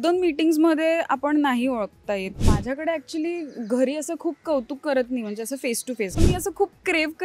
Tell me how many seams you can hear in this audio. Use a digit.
2